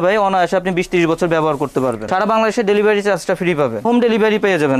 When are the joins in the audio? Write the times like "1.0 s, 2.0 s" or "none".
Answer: 2.0 s, 3.8 s